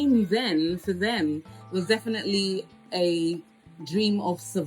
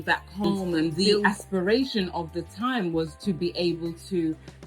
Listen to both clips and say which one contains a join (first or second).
second